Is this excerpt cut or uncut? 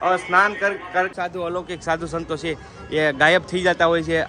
cut